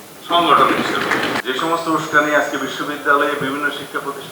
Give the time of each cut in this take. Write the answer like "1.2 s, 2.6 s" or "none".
1.4 s